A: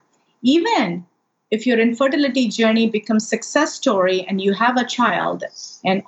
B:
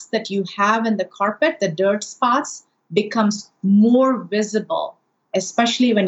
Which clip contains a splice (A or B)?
B